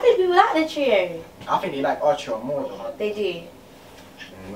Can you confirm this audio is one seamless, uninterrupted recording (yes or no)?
yes